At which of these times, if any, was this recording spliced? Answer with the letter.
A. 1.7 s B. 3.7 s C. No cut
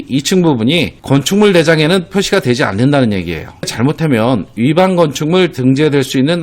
B